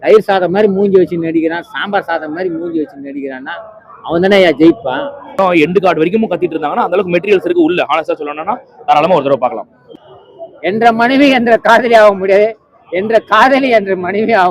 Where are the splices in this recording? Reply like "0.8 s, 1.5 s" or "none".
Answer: 5.3 s, 9.8 s